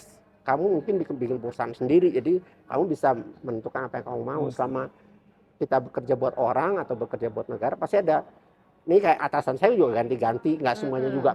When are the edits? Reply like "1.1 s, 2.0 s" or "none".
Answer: none